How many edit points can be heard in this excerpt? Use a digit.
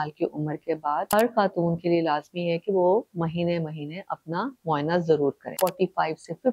2